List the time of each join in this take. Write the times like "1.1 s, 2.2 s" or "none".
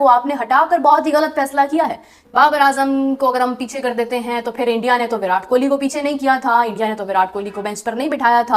2.3 s